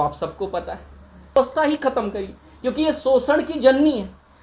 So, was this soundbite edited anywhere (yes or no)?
yes